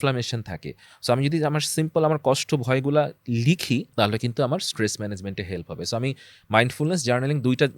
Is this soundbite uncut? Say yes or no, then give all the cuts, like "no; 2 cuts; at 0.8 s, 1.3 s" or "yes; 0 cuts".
no; 1 cut; at 3.9 s